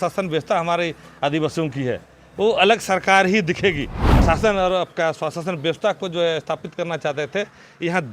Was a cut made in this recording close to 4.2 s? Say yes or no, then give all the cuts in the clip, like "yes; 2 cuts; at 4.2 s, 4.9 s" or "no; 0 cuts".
yes; 1 cut; at 4.2 s